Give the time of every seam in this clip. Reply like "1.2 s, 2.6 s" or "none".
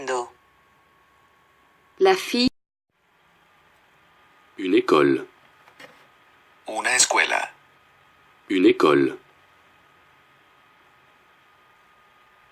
none